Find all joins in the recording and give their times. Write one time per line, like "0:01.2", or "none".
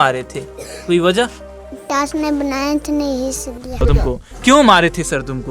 0:03.8